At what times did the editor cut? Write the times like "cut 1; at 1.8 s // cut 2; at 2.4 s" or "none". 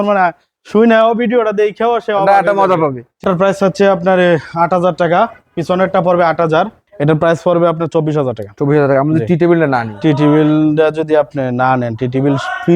cut 1; at 3.2 s // cut 2; at 6.8 s